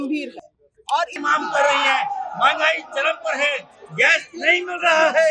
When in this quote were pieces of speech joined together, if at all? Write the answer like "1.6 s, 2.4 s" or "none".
1.2 s